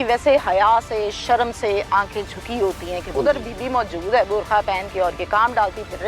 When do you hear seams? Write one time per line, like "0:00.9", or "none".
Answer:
0:03.0